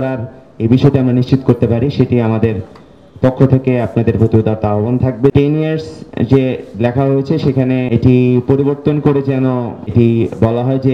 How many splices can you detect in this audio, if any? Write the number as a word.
three